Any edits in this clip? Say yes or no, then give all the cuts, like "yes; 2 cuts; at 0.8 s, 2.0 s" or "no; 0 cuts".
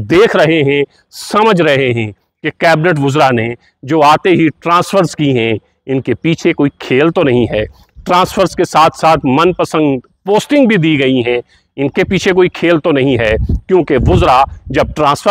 no; 0 cuts